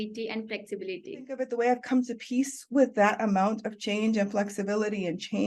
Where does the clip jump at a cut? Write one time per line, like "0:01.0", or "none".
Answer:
0:01.5